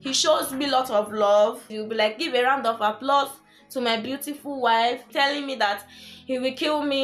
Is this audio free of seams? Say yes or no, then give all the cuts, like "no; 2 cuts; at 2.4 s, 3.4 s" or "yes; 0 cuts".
no; 2 cuts; at 1.8 s, 5.0 s